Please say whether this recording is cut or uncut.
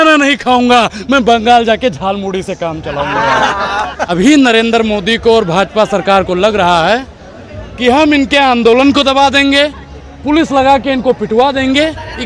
cut